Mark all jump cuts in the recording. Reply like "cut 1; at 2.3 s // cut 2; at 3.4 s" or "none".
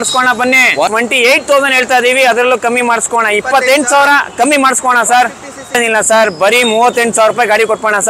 cut 1; at 0.9 s // cut 2; at 5.8 s